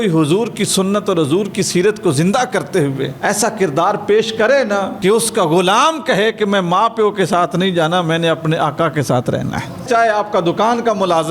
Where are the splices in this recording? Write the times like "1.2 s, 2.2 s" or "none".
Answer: 3.1 s, 4.9 s, 9.8 s